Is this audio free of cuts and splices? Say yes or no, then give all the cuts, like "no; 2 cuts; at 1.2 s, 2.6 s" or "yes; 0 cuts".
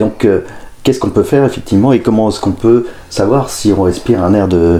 yes; 0 cuts